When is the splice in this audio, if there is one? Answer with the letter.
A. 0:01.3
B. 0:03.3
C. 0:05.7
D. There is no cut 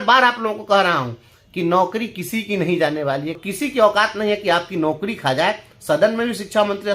B